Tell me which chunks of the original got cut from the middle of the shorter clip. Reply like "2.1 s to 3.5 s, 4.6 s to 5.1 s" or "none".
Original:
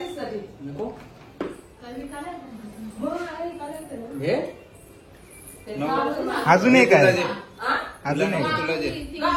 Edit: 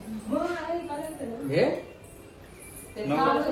none

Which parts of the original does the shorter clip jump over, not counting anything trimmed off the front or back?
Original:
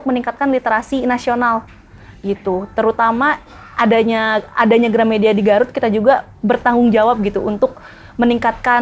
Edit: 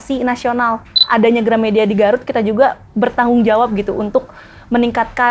1.8 s to 4.5 s

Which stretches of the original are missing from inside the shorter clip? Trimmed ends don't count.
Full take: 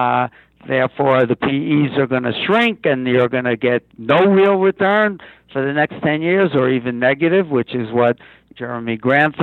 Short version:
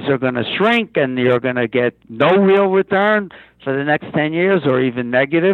none

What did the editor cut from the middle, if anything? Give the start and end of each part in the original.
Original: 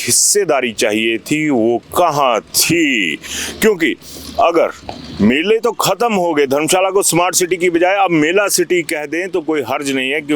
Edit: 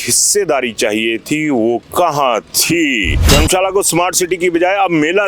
3.3 s to 6.5 s

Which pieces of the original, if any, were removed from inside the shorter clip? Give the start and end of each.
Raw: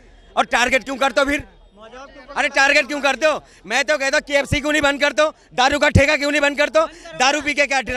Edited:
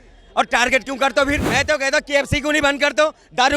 1.5 s to 3.7 s

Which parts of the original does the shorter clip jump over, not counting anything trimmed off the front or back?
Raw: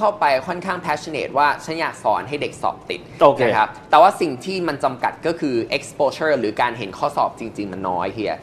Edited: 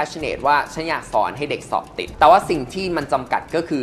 3.0 s to 3.8 s

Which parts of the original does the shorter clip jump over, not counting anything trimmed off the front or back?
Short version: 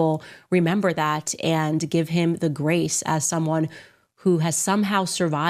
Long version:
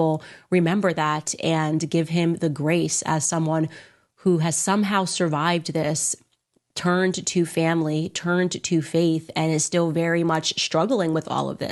none

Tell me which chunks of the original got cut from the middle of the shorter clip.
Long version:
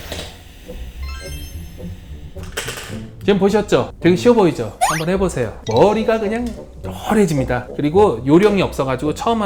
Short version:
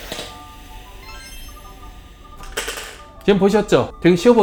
none

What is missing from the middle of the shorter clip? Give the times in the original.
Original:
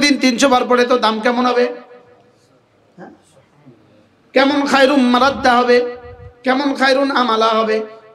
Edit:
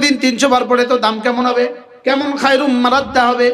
1.9 s to 4.2 s

